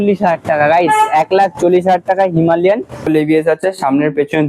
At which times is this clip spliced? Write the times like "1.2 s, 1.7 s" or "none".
3.0 s